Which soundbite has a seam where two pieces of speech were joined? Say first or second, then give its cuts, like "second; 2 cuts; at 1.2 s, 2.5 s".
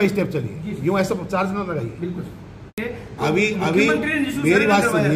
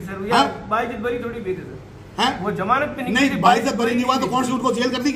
first; 1 cut; at 2.8 s